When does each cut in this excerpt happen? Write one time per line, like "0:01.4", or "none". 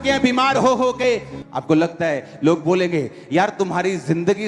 0:01.3